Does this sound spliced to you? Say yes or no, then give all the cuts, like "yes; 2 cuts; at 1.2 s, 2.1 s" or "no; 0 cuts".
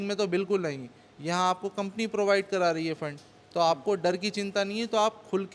no; 0 cuts